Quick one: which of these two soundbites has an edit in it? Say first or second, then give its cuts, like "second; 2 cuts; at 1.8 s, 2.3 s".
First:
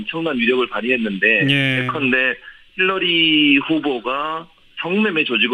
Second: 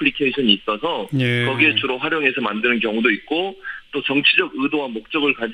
second; 1 cut; at 4.2 s